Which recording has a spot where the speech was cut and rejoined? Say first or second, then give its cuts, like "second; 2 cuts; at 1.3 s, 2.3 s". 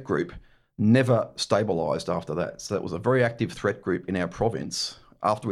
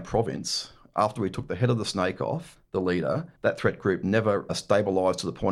second; 3 cuts; at 2.5 s, 3.3 s, 4.5 s